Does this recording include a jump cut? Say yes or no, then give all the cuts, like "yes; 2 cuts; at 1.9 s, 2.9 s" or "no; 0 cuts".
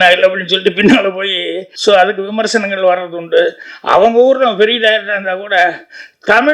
yes; 2 cuts; at 1.7 s, 3.7 s